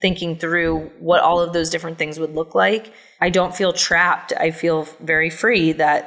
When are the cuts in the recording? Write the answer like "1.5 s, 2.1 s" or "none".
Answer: 0.9 s, 3.0 s